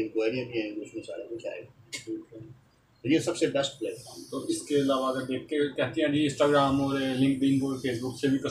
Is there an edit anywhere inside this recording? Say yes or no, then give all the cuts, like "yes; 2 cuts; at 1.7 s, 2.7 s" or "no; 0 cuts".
no; 0 cuts